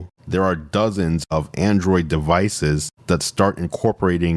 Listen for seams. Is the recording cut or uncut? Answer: cut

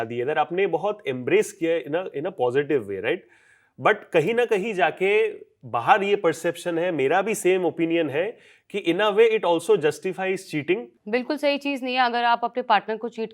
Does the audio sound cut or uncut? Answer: cut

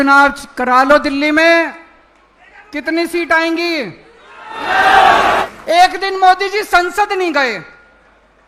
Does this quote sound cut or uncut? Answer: cut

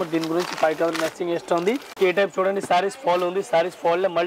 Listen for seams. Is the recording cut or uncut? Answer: cut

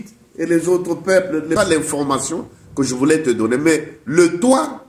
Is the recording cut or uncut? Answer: cut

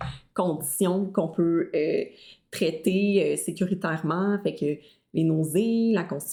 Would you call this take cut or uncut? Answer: uncut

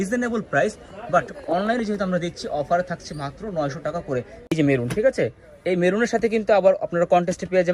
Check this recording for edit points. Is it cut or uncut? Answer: cut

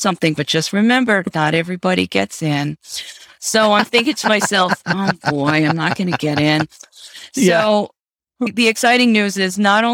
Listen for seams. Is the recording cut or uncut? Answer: cut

